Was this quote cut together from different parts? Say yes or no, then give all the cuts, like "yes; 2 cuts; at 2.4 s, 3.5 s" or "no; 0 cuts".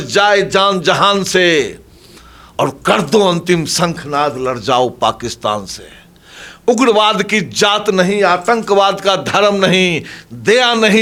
no; 0 cuts